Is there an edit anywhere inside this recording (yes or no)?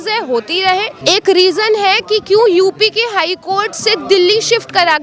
yes